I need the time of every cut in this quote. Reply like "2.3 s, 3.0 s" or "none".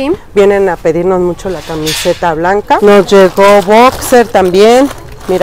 2.8 s